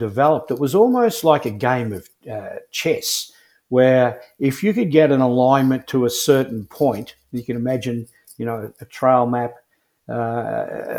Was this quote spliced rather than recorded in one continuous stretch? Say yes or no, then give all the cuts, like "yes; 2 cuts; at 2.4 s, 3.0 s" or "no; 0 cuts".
no; 0 cuts